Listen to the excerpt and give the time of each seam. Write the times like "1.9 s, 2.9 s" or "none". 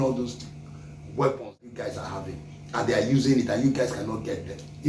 1.7 s